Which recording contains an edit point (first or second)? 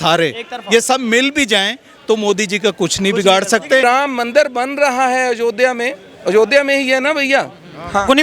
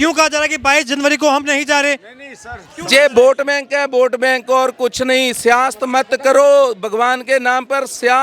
first